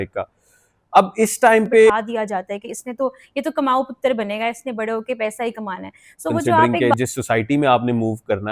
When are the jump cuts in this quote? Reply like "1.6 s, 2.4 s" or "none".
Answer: 1.9 s, 6.7 s